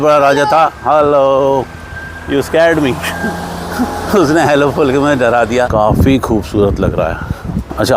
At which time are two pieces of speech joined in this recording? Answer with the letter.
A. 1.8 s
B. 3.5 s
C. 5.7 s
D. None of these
C